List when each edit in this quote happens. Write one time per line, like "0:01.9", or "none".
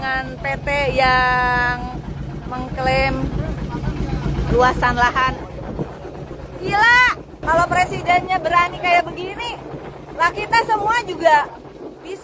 0:07.4